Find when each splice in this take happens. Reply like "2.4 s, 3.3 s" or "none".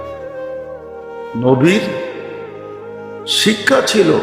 1.0 s